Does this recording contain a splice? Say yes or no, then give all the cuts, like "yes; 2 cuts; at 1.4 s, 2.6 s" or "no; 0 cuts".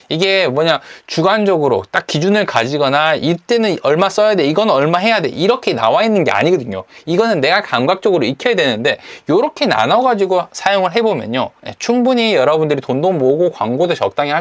no; 0 cuts